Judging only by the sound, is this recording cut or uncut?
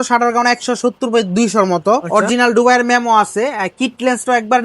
cut